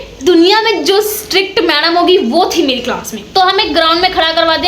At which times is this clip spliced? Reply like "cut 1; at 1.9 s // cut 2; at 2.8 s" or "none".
cut 1; at 3.1 s

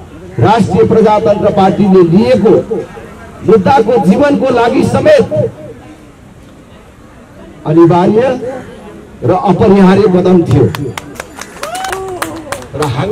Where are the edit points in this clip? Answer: cut 1; at 11.9 s

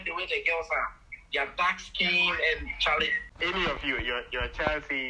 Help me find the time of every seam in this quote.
cut 1; at 3.2 s

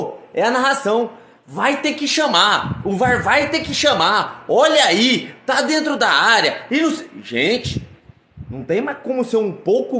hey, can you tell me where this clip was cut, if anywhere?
none

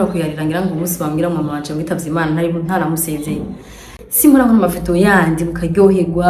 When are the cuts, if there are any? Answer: cut 1; at 4.0 s

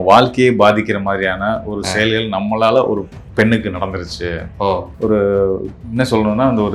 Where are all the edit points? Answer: cut 1; at 4.9 s

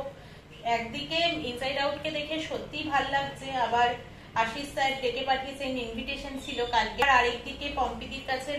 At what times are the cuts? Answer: cut 1; at 7.0 s

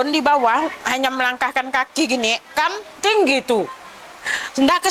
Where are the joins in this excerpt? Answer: none

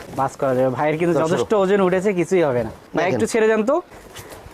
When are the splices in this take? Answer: cut 1; at 2.9 s

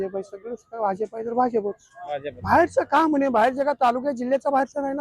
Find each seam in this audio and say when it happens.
cut 1; at 2.3 s

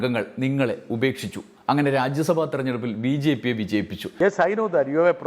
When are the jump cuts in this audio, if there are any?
cut 1; at 4.1 s

